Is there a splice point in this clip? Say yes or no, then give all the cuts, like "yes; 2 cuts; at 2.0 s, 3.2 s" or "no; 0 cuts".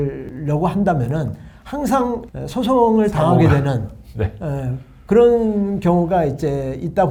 no; 0 cuts